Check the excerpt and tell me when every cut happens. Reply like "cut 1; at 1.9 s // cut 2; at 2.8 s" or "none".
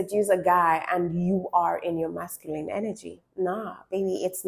none